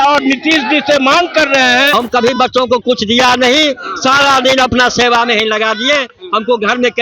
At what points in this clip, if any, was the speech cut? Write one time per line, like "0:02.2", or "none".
0:01.9